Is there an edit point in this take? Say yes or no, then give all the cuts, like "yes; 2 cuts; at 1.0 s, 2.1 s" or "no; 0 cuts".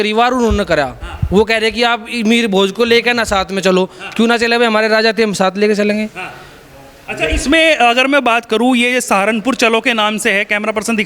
no; 0 cuts